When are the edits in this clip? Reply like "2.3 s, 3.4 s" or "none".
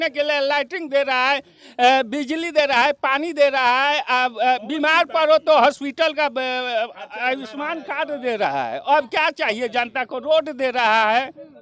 none